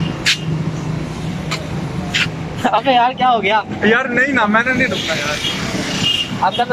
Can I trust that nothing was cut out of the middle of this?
yes; 0 cuts

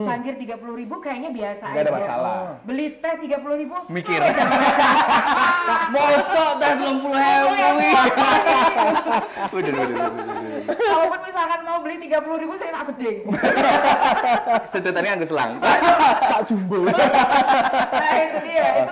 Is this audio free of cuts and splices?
yes; 0 cuts

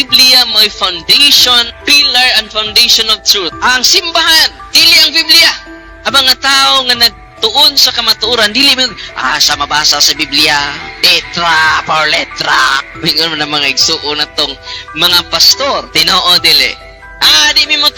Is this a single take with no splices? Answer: yes; 0 cuts

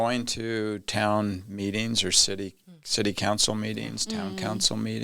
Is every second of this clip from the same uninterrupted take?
yes; 0 cuts

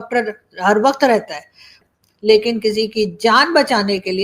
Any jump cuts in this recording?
yes; 1 cut; at 1.7 s

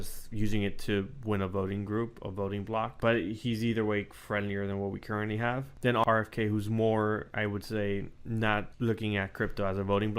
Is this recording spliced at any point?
yes; 3 cuts; at 2.9 s, 5.9 s, 8.7 s

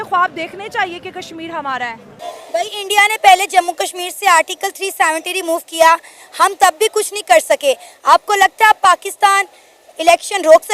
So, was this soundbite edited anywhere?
yes; 1 cut; at 2.2 s

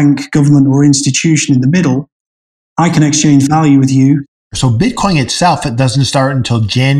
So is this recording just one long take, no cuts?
no; 1 cut; at 4.3 s

